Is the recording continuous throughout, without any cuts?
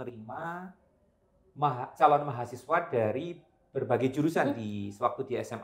yes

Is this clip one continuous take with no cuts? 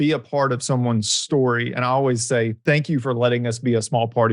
no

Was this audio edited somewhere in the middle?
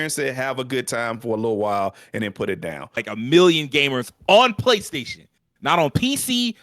yes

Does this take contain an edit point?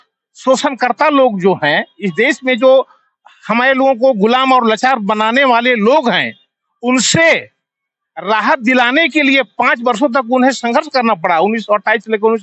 no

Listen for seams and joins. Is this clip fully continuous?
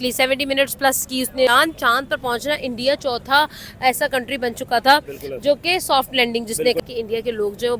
no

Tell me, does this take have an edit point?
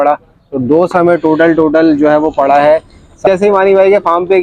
yes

